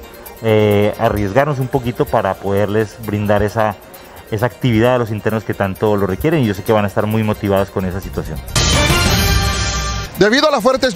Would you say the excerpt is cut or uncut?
cut